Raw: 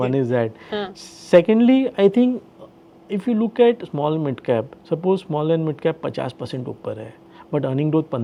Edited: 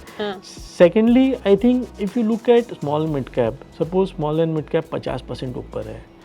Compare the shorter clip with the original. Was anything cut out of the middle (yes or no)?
yes